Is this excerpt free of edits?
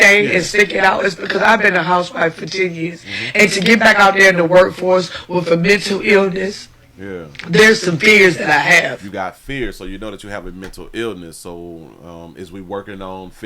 yes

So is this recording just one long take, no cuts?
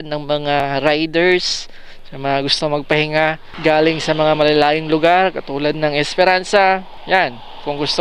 no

